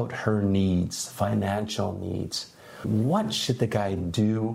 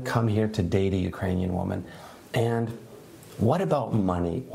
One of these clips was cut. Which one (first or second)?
first